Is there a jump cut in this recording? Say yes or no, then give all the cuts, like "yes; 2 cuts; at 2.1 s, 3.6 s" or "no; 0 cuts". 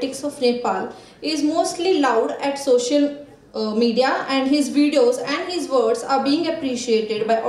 no; 0 cuts